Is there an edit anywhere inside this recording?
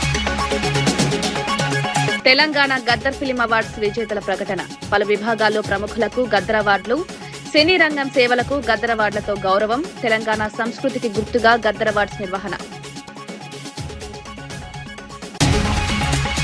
no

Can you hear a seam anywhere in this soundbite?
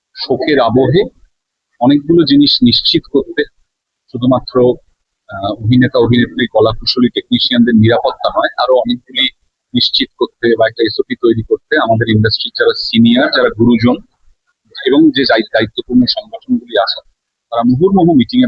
no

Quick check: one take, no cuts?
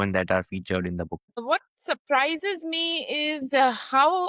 no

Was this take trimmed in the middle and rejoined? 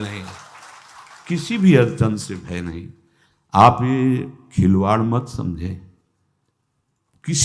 no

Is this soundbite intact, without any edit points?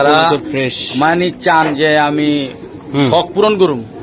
yes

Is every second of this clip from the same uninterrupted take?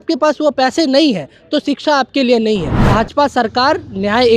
no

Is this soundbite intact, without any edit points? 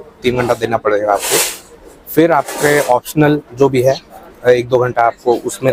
yes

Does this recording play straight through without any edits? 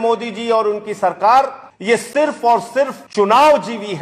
no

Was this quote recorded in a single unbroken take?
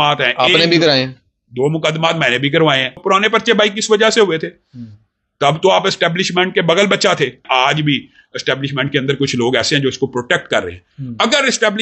no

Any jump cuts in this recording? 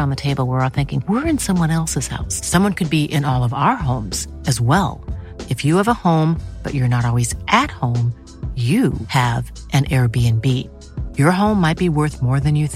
no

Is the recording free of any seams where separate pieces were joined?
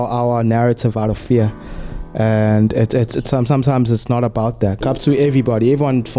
no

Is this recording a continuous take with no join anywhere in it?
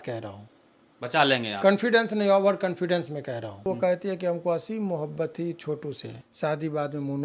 no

